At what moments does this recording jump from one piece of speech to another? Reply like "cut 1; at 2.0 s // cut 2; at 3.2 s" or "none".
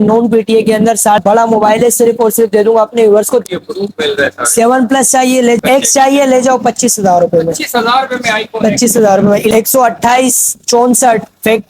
cut 1; at 1.2 s // cut 2; at 3.4 s // cut 3; at 5.6 s // cut 4; at 9.5 s